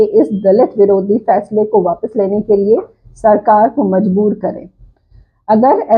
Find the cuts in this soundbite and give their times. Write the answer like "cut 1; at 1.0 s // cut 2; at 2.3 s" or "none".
none

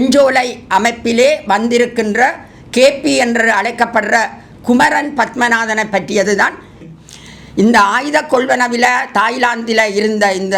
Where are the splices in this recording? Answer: cut 1; at 6.8 s

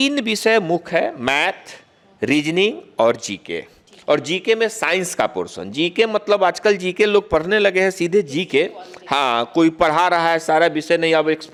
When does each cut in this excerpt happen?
none

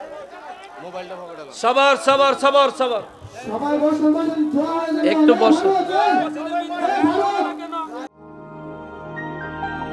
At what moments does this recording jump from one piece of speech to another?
cut 1; at 8.1 s

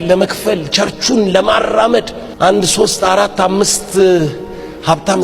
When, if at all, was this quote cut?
cut 1; at 2.2 s

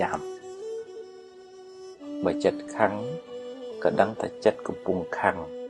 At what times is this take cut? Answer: none

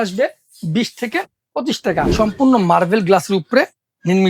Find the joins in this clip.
cut 1; at 2.1 s

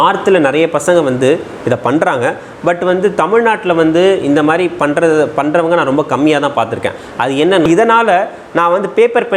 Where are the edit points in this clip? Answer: cut 1; at 7.7 s

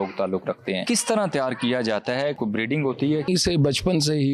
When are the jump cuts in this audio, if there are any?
cut 1; at 0.8 s // cut 2; at 2.4 s // cut 3; at 3.3 s

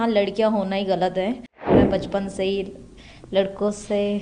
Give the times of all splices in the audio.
cut 1; at 1.7 s

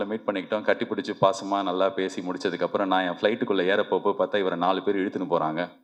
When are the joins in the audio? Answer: none

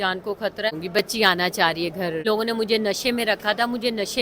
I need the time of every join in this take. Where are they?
cut 1; at 0.7 s // cut 2; at 2.2 s

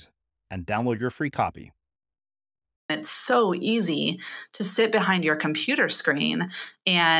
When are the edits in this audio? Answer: cut 1; at 2.9 s

